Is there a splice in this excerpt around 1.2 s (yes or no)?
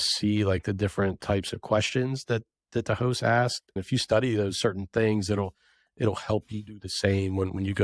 no